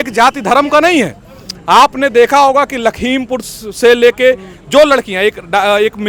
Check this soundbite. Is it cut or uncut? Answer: uncut